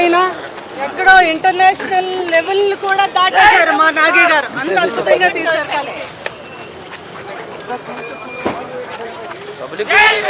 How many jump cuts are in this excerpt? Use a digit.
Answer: 1